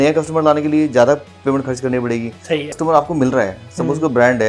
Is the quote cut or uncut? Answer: cut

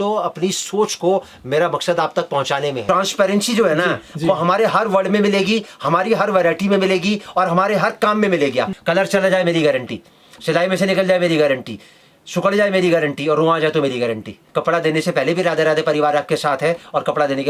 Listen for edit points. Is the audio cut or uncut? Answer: cut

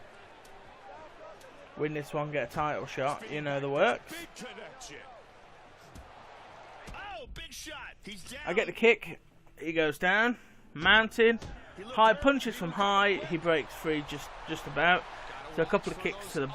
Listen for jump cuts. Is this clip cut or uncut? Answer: uncut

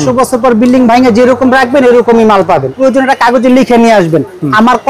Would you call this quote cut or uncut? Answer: cut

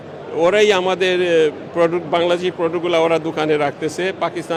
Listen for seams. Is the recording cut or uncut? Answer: uncut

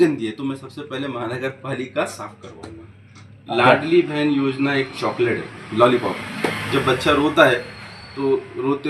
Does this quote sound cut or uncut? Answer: cut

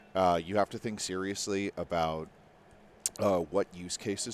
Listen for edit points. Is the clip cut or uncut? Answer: uncut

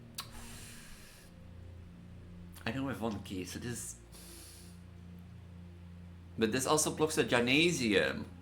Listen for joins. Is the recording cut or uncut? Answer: uncut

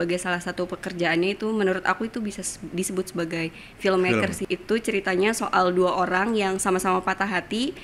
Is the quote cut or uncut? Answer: cut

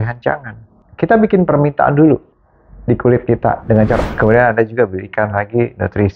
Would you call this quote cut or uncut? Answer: cut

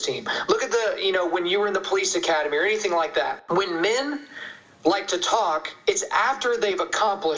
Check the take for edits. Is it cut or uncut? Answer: cut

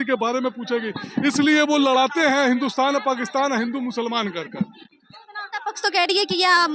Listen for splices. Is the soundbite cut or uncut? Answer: uncut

